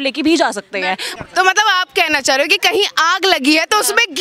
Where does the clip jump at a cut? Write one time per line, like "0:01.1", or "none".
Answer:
0:01.0